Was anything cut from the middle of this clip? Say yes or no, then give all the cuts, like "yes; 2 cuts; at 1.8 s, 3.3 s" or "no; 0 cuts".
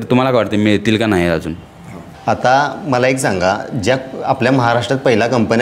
no; 0 cuts